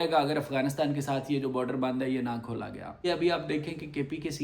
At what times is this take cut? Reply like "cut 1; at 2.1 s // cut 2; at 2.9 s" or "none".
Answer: cut 1; at 3.1 s